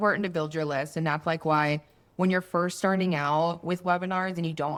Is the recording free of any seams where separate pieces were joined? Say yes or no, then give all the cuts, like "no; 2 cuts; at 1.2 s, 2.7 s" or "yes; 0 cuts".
yes; 0 cuts